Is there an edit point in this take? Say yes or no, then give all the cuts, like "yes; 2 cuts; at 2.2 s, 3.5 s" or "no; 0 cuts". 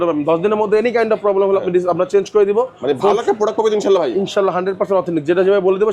no; 0 cuts